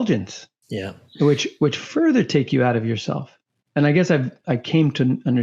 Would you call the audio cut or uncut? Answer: uncut